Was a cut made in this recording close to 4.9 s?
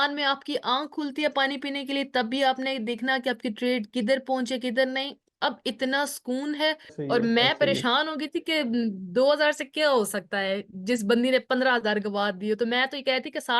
no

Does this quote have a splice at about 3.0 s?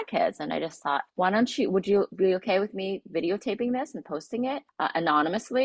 no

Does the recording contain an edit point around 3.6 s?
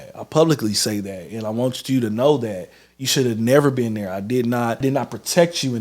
no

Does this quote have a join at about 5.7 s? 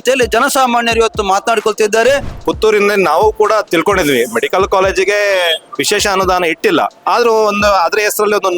yes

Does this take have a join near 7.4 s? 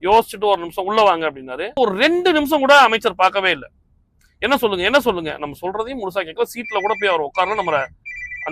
no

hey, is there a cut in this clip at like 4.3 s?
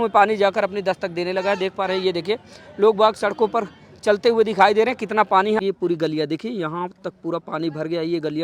no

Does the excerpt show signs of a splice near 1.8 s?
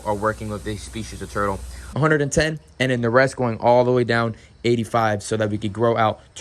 yes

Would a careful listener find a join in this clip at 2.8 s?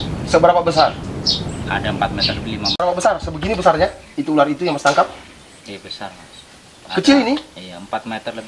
yes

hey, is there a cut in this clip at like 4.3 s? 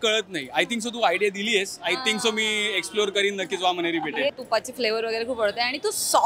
yes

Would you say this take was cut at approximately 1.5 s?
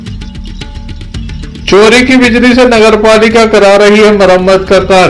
yes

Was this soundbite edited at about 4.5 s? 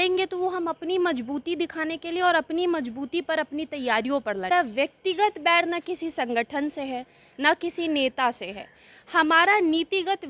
yes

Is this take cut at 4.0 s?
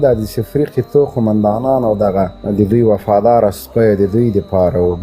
no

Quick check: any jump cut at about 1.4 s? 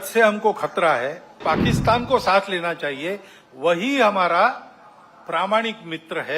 yes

